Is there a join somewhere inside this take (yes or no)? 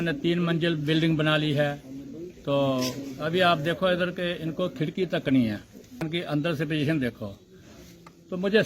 yes